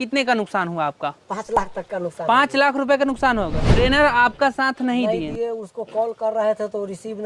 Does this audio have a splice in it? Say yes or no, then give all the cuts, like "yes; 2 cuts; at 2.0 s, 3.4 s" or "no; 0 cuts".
yes; 1 cut; at 3.6 s